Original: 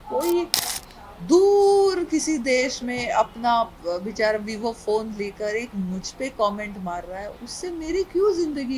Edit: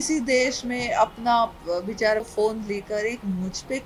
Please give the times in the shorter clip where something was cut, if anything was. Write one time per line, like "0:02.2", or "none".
0:02.3